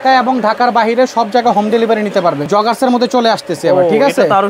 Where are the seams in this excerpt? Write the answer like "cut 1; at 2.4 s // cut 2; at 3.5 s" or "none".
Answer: cut 1; at 2.5 s